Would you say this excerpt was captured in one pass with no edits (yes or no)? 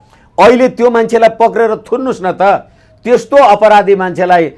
yes